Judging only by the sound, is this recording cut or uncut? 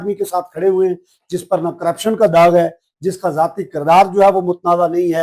uncut